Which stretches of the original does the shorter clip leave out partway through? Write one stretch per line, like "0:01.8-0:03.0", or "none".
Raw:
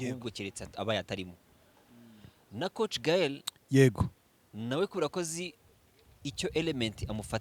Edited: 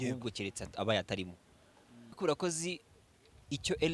0:02.2-0:04.9